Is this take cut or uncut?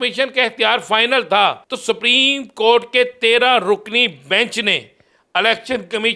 cut